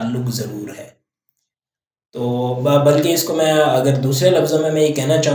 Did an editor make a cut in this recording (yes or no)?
no